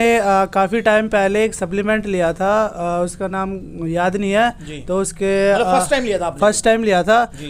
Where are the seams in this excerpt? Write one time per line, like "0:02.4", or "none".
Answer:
none